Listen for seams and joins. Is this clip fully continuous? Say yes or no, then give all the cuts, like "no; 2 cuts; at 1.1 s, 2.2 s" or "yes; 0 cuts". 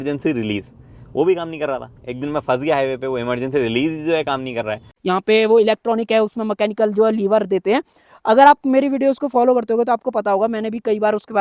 yes; 0 cuts